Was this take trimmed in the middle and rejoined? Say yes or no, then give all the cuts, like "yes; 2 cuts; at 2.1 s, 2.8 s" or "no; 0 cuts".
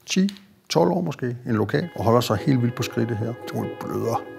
yes; 2 cuts; at 1.9 s, 3.4 s